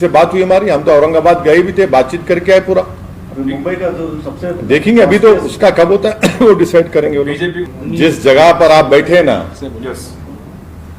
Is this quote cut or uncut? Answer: cut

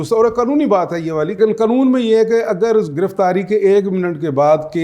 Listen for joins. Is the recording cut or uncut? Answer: cut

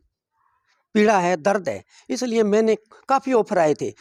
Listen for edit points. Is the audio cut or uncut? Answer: uncut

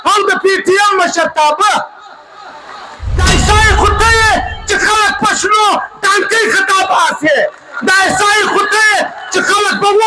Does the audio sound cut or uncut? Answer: cut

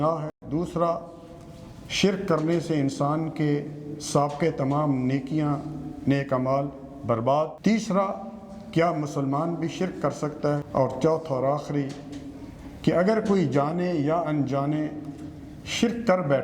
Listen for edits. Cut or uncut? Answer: cut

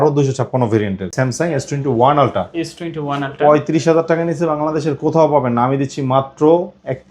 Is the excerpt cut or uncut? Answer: cut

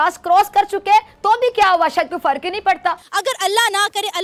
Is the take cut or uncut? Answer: cut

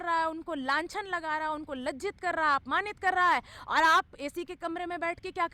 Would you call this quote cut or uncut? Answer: uncut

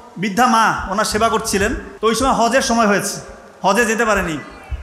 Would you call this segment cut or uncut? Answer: cut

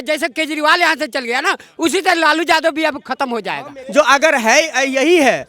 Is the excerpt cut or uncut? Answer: cut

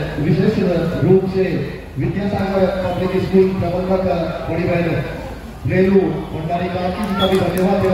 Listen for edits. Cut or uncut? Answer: uncut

